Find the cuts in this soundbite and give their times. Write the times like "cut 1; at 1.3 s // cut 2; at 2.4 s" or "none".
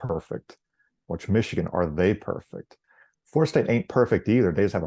none